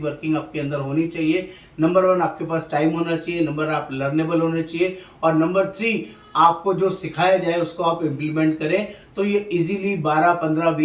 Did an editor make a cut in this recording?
no; 0 cuts

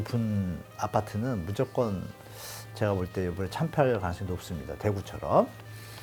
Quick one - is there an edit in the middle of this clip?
no; 0 cuts

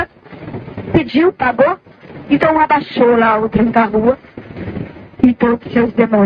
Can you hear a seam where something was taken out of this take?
no; 0 cuts

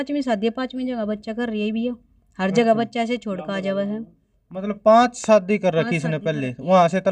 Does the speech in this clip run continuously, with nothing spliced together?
yes; 0 cuts

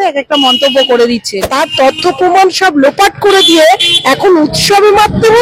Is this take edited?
yes; 1 cut; at 1.4 s

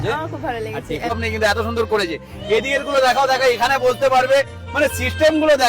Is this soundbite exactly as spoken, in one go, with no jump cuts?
no; 1 cut; at 1.1 s

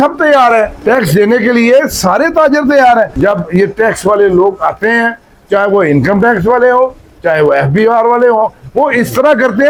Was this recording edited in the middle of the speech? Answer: no; 0 cuts

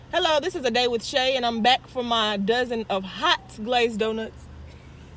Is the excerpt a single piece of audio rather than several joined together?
yes; 0 cuts

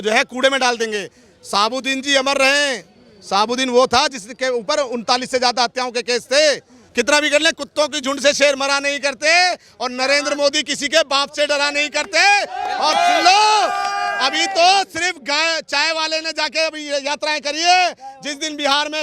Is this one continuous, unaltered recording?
no; 1 cut; at 6.8 s

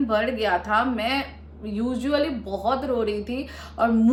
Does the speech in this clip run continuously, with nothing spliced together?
yes; 0 cuts

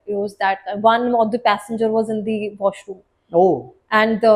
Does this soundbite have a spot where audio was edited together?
no; 0 cuts

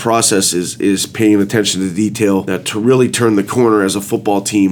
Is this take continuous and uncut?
no; 1 cut; at 2.5 s

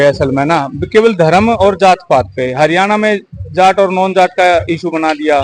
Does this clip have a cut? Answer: no; 0 cuts

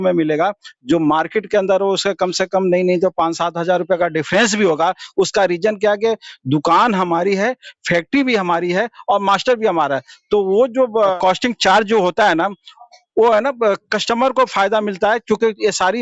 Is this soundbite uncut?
yes; 0 cuts

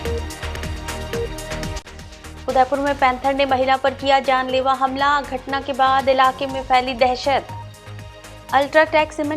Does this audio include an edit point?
yes; 1 cut; at 1.6 s

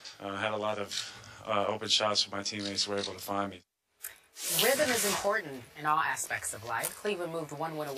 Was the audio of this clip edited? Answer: yes; 1 cut; at 5.5 s

